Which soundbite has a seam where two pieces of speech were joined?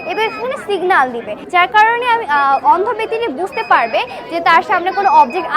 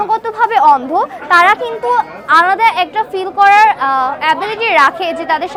first; 1 cut; at 1.4 s

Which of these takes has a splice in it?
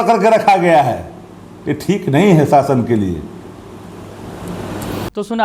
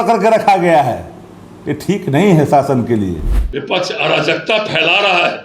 second; 1 cut; at 3.4 s

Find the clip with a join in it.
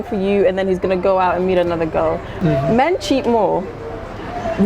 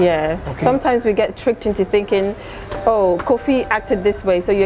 first; 1 cut; at 2.4 s

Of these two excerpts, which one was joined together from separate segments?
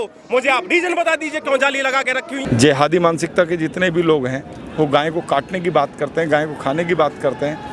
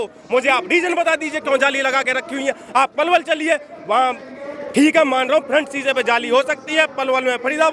first; 1 cut; at 2.4 s

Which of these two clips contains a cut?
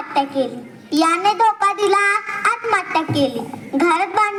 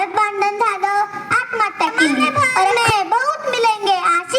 second; 1 cut; at 2.7 s

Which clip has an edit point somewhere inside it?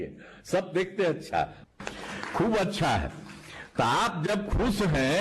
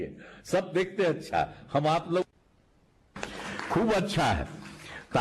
first; 1 cut; at 1.6 s

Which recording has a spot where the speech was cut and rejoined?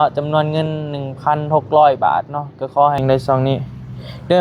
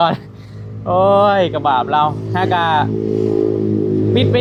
first; 1 cut; at 3.0 s

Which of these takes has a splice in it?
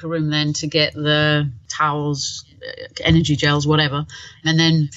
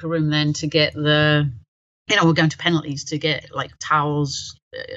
first; 1 cut; at 1.6 s

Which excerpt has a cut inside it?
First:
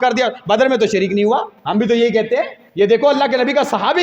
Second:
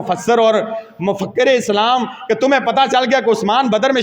first; 2 cuts; at 1.6 s, 2.6 s

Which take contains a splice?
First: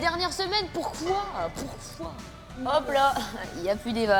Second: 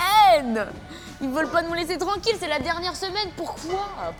first; 1 cut; at 2.5 s

